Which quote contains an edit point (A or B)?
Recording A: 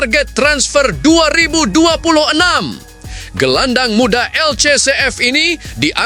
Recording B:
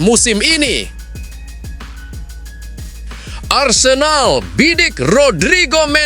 B